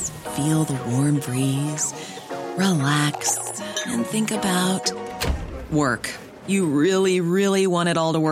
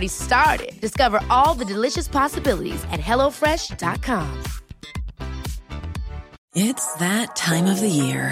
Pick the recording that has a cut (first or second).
second